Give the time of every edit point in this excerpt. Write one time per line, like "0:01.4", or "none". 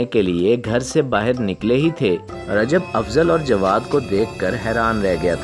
0:02.4